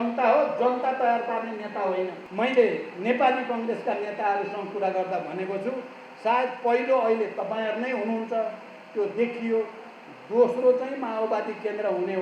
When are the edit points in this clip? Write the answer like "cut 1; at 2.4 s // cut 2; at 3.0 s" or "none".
cut 1; at 2.2 s